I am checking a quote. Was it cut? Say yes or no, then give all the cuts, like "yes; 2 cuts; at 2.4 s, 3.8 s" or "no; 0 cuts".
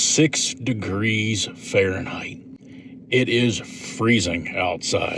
no; 0 cuts